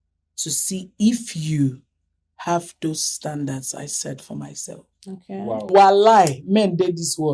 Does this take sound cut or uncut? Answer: cut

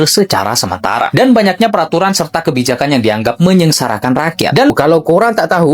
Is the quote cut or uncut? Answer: cut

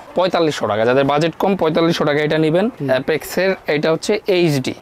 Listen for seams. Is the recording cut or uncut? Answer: cut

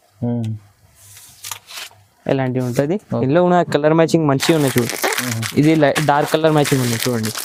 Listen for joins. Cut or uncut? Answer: uncut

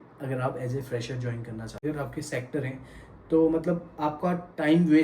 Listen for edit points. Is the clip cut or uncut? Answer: cut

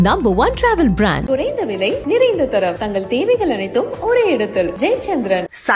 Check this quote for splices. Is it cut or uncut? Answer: uncut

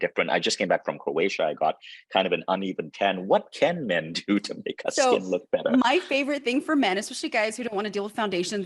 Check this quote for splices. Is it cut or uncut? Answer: uncut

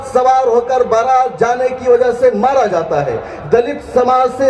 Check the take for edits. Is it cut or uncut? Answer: uncut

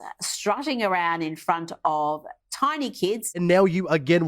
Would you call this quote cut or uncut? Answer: cut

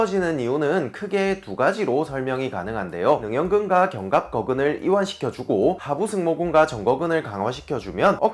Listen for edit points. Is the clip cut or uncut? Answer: cut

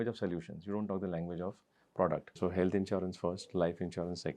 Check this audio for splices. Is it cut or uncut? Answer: cut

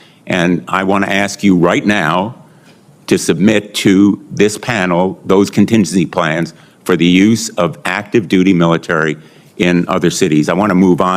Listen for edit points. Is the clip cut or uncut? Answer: uncut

